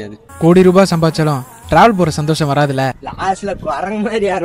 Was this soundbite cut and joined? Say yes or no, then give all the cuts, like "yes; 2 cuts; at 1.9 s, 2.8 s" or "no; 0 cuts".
yes; 1 cut; at 3.1 s